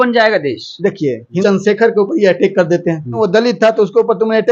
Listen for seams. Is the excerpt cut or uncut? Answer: cut